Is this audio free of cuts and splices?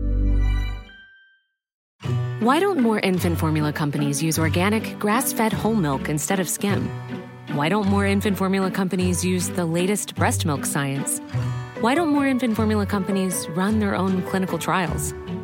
no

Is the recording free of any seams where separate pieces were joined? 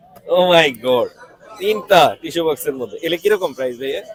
yes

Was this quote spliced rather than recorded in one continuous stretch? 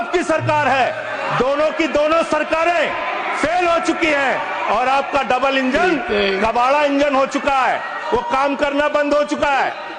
no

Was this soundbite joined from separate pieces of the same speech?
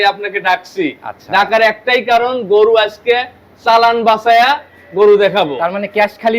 no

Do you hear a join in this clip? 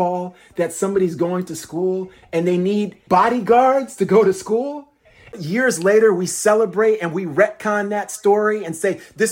yes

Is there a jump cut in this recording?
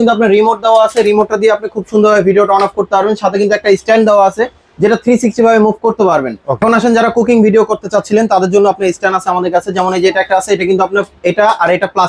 yes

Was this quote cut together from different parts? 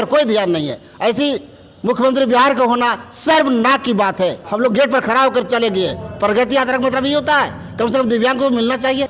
yes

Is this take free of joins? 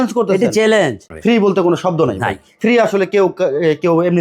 no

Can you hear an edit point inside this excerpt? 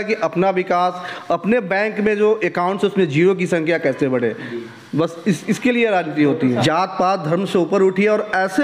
yes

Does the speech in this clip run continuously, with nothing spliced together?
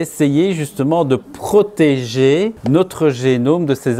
no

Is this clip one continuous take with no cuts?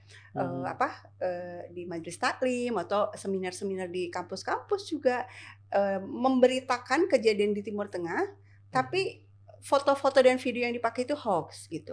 yes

